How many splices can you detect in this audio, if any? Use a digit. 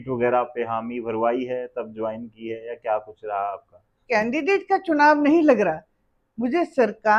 1